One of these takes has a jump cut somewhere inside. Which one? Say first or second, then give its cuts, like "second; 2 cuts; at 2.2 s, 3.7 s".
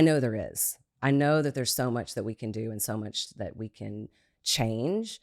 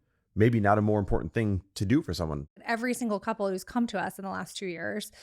second; 1 cut; at 2.5 s